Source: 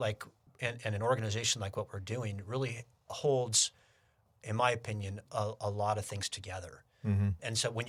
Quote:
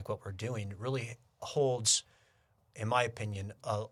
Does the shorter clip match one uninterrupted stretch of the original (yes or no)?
yes